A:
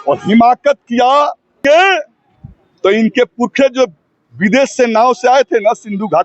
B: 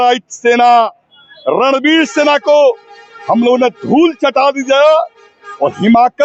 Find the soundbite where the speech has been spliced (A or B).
A